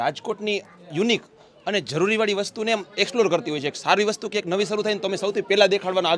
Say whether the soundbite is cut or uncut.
uncut